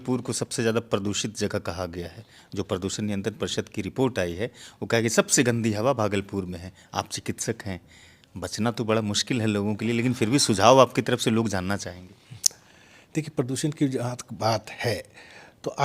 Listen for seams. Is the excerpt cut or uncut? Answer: uncut